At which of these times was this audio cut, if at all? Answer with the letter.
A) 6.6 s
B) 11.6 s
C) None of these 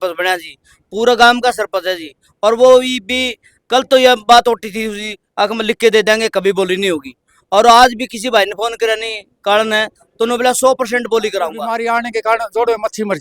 B